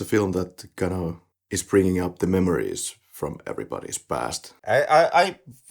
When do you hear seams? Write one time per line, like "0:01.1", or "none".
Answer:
0:04.5

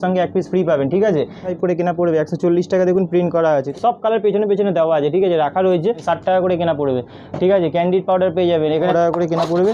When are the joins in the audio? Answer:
0:01.5
0:03.7
0:06.0
0:08.9

